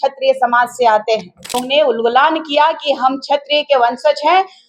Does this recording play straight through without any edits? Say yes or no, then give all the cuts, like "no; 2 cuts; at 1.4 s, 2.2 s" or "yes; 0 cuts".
no; 1 cut; at 1.6 s